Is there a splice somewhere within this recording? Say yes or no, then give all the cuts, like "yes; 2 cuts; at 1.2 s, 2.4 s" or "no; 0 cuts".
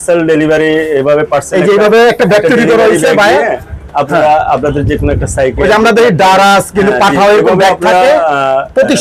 no; 0 cuts